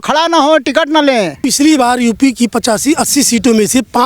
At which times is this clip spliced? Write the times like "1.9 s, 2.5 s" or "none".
1.4 s